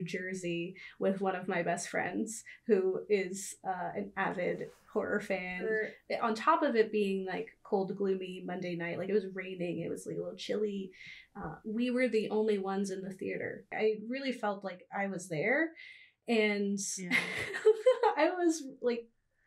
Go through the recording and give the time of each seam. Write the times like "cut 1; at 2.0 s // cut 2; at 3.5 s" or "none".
cut 1; at 5.9 s // cut 2; at 13.7 s